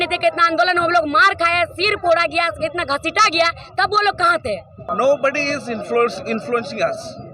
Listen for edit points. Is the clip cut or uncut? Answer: cut